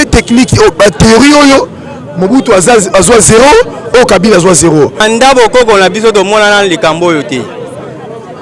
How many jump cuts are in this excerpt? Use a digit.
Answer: 1